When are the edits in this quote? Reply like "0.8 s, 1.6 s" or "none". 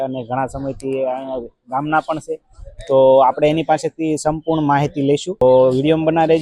5.4 s